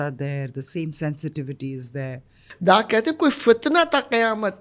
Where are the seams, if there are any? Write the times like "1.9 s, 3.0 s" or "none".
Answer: 2.5 s